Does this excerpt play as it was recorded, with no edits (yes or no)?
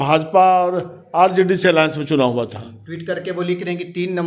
yes